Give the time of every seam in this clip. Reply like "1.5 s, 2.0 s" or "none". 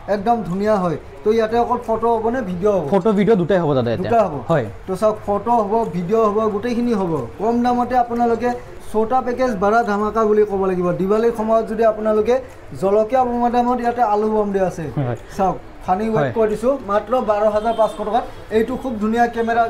8.8 s